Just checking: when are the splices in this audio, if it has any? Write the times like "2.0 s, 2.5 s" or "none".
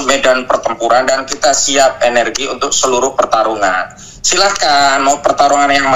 none

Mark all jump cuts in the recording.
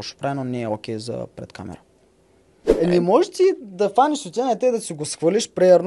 2.6 s

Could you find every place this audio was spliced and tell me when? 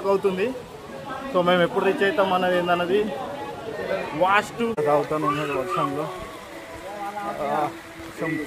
4.8 s

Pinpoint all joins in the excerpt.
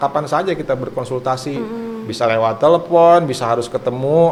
none

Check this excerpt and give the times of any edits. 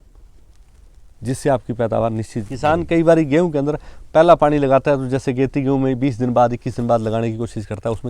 2.5 s

